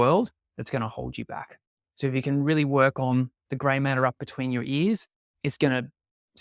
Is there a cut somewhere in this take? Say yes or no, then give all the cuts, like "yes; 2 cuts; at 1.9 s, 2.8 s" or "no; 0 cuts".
no; 0 cuts